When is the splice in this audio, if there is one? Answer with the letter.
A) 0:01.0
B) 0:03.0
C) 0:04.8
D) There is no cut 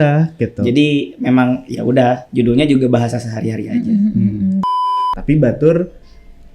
C